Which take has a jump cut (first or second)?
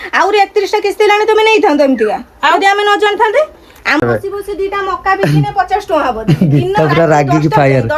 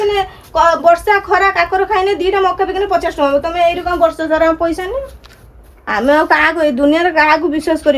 first